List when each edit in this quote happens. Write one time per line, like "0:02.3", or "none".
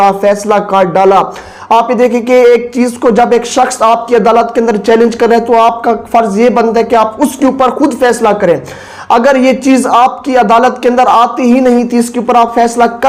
none